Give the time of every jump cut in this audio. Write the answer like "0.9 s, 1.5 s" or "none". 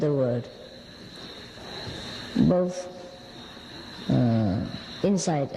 2.5 s